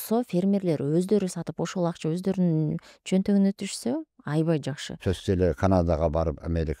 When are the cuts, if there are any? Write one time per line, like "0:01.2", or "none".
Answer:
0:04.9